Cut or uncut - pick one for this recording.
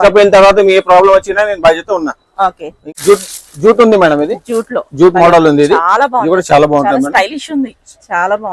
cut